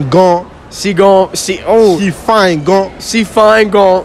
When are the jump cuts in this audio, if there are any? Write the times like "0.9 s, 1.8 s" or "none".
none